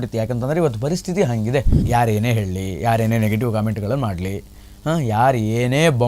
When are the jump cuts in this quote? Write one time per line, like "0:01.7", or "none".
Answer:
0:01.8

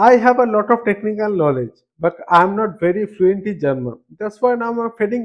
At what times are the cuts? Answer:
none

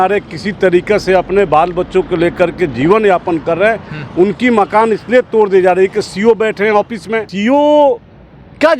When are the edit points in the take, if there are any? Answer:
0:07.3

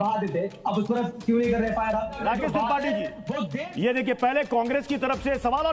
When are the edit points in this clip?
0:02.2

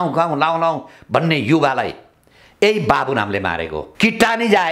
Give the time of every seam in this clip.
0:03.8

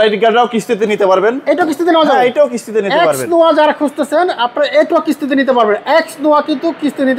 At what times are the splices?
none

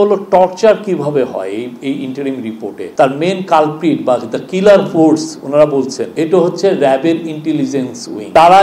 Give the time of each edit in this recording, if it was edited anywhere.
0:02.9

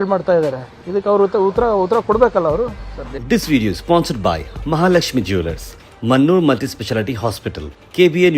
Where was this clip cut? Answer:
0:03.1

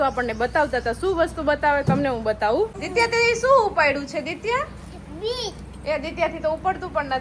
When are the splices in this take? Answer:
none

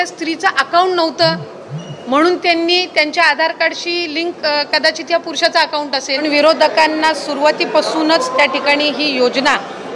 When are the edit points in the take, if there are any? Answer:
0:06.2

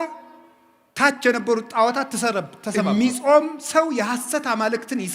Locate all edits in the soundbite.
0:02.6

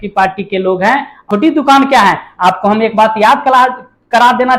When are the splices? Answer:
0:01.2

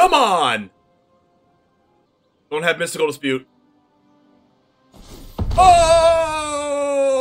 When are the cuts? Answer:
0:02.1

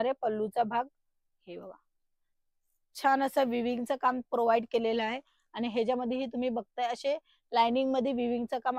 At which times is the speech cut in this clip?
none

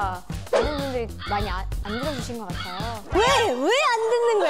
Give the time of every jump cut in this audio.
0:03.1

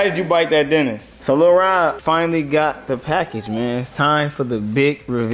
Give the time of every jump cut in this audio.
0:01.1
0:02.0

